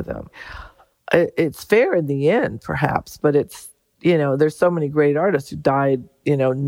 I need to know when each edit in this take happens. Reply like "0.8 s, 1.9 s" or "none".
none

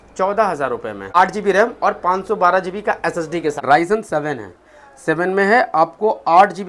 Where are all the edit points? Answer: 1.1 s, 3.6 s

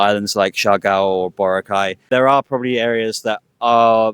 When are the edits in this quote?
2.0 s

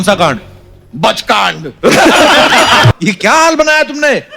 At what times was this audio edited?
2.9 s

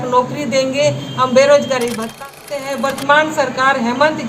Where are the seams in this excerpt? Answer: 2.2 s

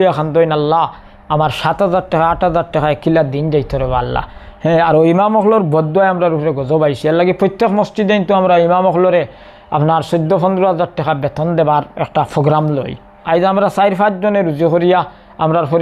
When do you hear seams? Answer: 13.1 s

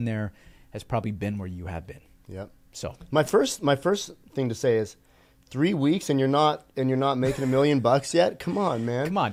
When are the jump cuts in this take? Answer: none

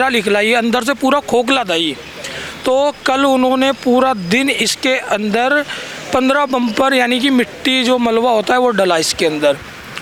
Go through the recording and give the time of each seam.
none

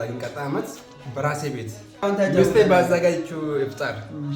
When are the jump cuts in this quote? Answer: 2.0 s

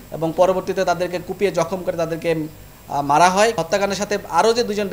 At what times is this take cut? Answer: 3.6 s

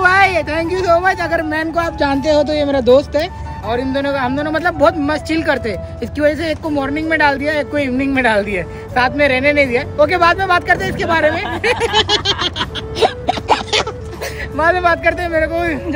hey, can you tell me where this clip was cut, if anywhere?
none

